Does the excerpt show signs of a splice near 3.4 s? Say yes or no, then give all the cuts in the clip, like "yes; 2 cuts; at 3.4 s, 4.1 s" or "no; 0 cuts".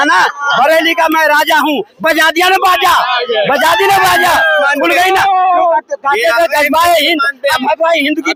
no; 0 cuts